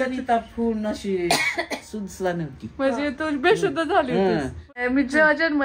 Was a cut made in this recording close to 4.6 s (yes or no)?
yes